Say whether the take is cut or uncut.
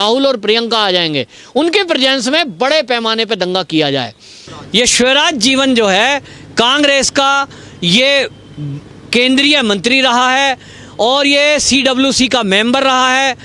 cut